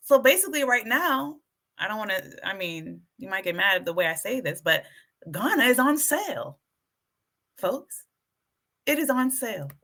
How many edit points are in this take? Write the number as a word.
zero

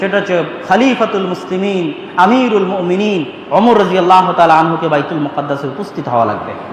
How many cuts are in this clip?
zero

